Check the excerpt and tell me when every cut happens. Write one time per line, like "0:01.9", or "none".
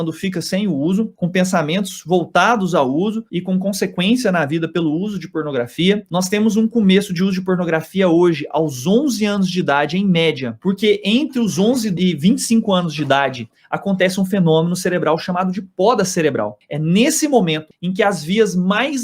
0:10.5
0:12.0
0:13.5
0:16.6